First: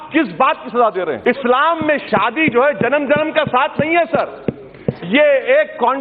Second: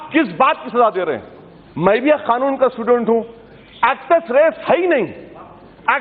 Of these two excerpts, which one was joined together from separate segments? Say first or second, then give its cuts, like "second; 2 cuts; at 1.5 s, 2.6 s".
first; 1 cut; at 1.2 s